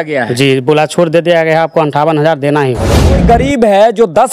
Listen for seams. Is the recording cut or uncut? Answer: cut